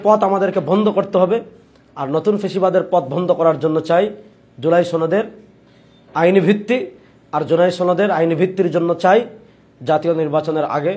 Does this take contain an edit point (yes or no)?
no